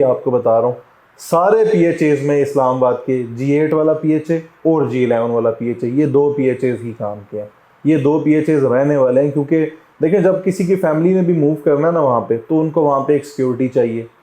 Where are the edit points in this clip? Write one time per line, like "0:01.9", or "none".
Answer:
none